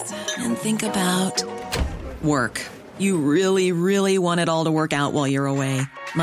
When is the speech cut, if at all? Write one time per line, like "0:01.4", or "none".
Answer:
none